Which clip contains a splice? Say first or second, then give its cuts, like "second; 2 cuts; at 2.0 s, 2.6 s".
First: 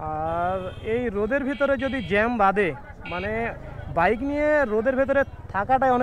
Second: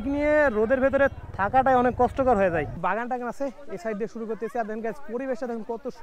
second; 1 cut; at 2.8 s